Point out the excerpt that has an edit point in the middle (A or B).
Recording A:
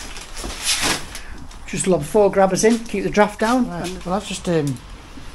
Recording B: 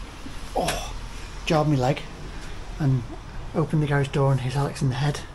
A